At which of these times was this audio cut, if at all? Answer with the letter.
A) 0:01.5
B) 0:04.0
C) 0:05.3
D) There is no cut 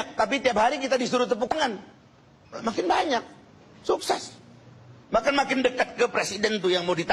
A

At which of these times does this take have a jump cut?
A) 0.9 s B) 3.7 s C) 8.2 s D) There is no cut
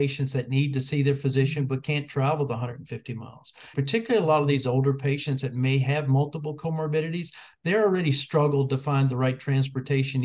B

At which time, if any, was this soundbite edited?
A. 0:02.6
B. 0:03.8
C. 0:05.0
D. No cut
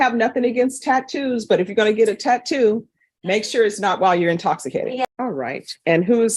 C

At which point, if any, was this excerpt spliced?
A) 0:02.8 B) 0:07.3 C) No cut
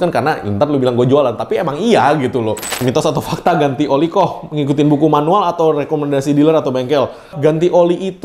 A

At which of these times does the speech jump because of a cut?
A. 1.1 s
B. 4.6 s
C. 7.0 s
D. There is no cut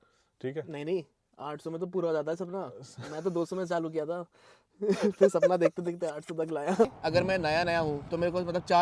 C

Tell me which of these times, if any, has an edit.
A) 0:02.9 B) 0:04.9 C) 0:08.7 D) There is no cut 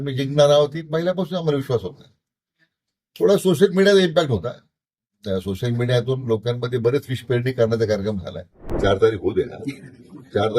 C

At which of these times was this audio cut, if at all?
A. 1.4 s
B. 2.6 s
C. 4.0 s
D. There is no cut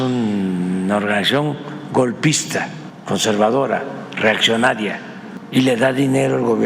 D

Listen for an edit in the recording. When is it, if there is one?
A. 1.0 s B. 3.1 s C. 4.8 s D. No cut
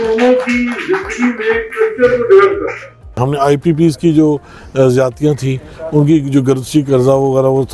B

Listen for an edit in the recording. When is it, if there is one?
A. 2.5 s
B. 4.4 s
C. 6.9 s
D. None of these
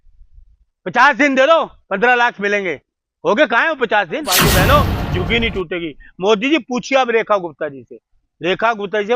B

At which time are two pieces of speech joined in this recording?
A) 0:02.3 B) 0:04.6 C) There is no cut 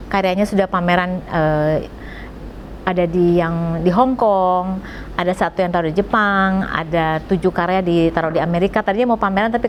C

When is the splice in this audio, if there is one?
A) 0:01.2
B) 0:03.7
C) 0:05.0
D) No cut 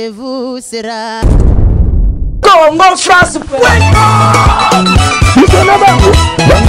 A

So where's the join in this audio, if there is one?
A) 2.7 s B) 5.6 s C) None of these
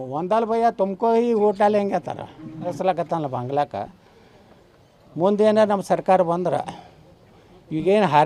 A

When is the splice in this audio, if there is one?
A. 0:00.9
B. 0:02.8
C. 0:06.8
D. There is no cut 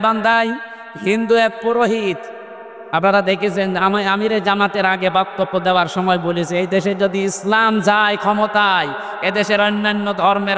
D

